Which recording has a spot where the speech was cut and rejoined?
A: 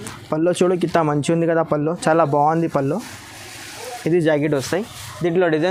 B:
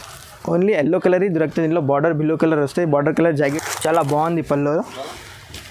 B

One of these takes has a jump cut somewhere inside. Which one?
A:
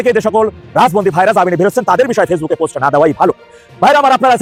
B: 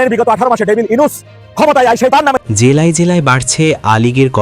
B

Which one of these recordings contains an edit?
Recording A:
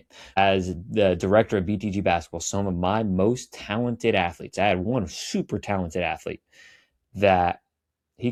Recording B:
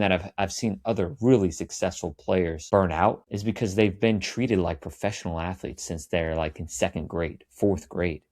B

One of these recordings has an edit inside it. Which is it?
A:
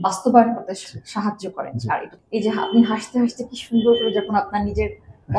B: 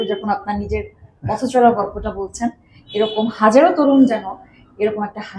A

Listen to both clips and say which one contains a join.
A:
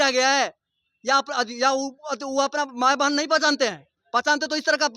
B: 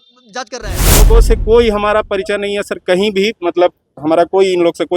B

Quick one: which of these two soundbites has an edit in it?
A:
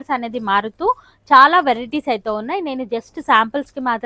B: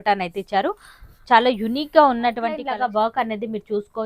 B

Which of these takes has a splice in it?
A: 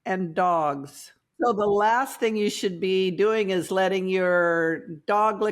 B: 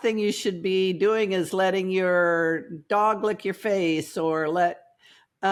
A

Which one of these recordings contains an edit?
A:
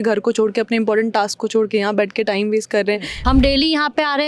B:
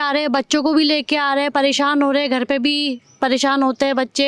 A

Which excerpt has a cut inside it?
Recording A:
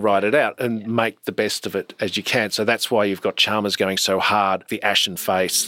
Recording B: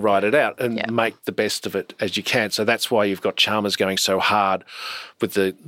A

